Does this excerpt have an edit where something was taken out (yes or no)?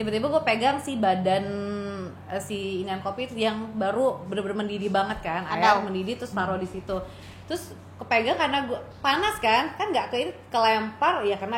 no